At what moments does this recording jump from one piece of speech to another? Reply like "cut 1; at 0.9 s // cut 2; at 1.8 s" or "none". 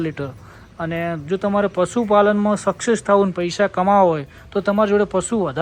none